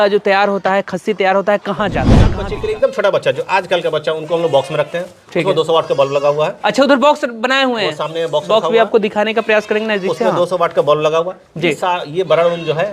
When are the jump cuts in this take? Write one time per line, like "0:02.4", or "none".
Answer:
0:02.3